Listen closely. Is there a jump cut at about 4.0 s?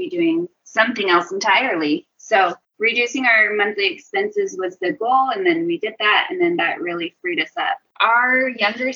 no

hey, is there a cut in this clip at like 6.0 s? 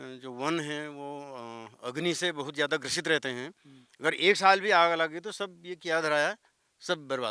no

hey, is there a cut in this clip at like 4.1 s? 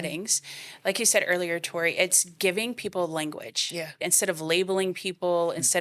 yes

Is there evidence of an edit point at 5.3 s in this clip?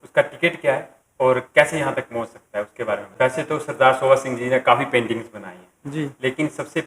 no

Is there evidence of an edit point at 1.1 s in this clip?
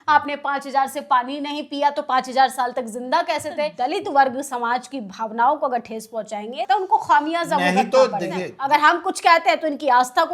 no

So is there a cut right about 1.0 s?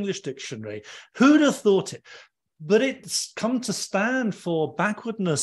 no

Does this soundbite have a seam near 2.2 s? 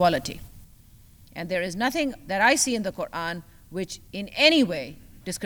no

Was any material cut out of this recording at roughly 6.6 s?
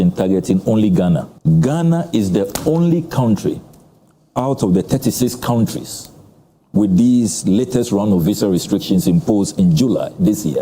no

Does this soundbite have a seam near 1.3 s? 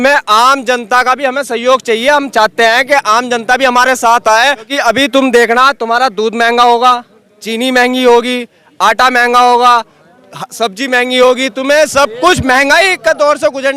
no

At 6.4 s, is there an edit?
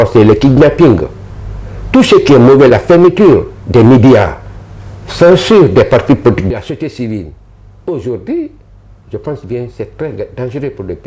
yes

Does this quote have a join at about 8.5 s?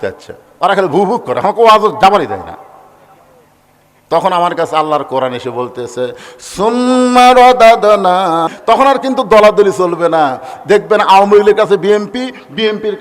yes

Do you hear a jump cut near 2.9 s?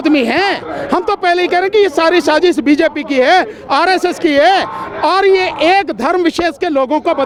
no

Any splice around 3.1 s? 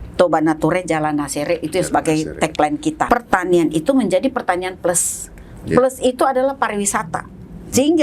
yes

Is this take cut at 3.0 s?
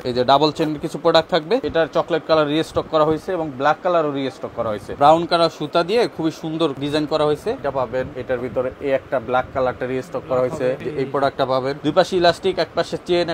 no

